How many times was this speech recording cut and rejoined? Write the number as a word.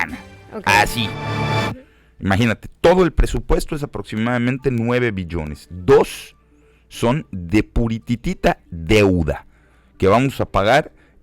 one